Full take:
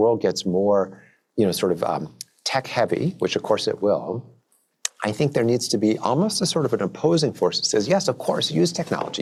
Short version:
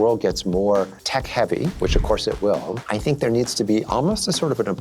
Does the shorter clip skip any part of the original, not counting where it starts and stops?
yes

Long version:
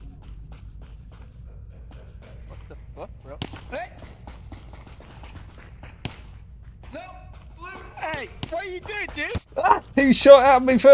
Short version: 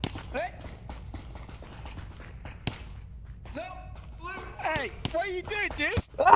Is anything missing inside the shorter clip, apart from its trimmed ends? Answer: no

